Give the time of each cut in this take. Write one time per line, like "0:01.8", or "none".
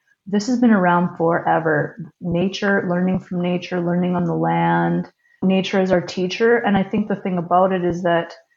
none